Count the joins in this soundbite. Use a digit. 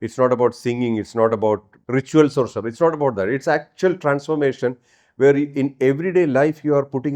1